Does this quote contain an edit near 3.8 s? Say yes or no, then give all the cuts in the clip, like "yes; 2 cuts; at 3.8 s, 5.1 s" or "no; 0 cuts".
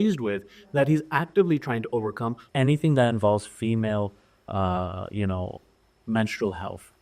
no; 1 cut; at 2.4 s